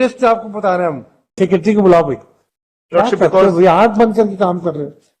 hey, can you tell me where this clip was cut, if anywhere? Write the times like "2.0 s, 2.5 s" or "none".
1.4 s